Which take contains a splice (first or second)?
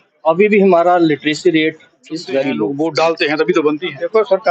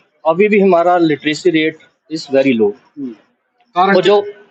first